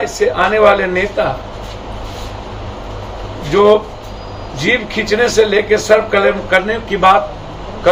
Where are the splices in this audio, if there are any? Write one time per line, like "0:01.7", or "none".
none